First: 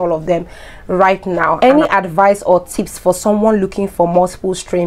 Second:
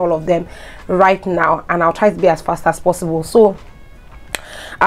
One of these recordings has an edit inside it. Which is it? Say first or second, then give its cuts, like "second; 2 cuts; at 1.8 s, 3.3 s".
first; 1 cut; at 1.5 s